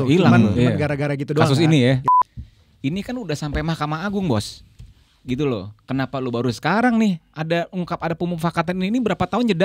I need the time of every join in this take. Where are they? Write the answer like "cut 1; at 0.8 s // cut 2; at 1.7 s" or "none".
cut 1; at 2.0 s